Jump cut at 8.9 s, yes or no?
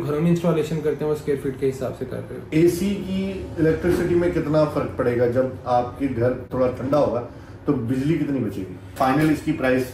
yes